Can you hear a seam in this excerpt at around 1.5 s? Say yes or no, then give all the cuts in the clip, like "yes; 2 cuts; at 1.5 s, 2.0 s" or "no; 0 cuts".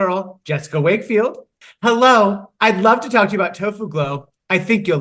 yes; 1 cut; at 1.5 s